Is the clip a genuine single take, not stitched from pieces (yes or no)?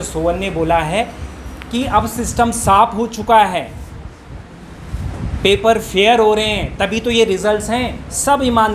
yes